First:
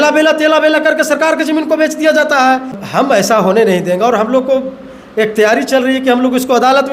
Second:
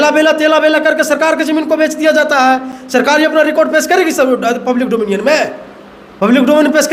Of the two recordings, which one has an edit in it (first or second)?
first